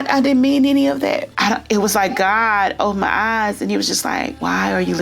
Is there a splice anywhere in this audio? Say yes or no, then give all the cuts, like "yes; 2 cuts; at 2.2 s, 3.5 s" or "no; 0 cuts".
yes; 1 cut; at 1.3 s